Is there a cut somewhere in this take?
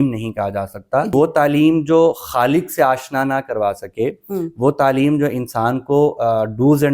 yes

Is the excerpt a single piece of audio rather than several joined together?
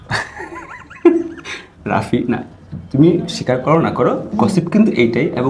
yes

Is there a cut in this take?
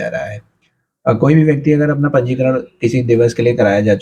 no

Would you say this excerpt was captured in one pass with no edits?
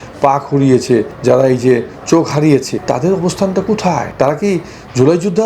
no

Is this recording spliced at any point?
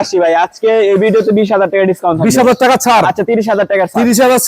no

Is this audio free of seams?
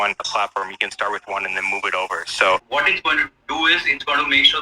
no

